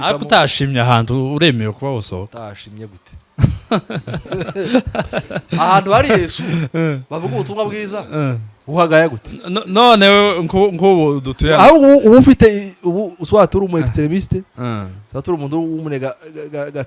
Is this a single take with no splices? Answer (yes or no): yes